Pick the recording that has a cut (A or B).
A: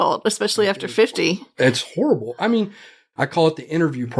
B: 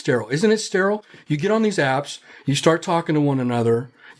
A